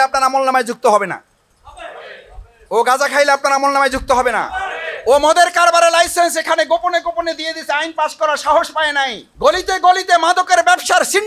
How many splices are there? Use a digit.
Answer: 1